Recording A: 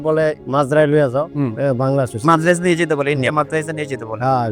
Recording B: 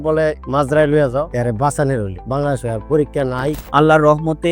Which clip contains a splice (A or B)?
B